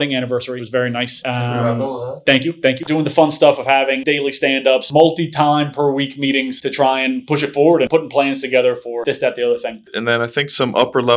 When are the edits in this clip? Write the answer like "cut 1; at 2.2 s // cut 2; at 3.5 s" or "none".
cut 1; at 2.8 s // cut 2; at 9.9 s

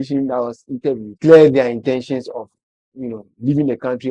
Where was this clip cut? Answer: cut 1; at 1.1 s

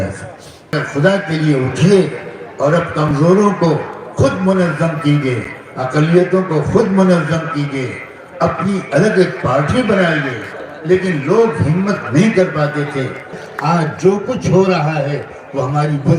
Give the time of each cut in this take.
cut 1; at 0.7 s // cut 2; at 13.4 s

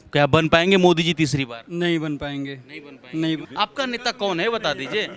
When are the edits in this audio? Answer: cut 1; at 3.5 s

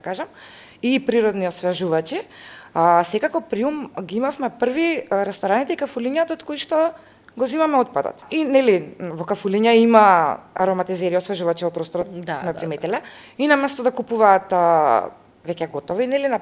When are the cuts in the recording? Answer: cut 1; at 8.2 s

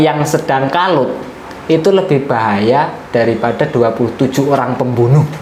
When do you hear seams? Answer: none

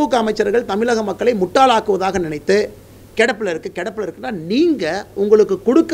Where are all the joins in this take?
none

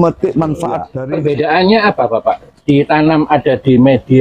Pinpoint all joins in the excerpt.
cut 1; at 0.9 s

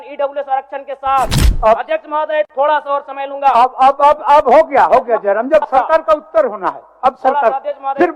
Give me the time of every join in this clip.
cut 1; at 1.5 s

